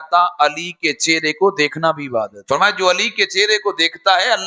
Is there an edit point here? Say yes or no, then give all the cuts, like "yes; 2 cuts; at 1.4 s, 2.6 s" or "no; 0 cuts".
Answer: yes; 1 cut; at 2.3 s